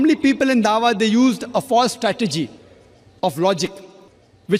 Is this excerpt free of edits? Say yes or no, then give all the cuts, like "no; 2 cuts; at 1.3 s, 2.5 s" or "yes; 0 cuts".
yes; 0 cuts